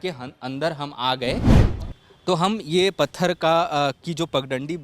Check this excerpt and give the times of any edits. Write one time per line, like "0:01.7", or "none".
0:01.6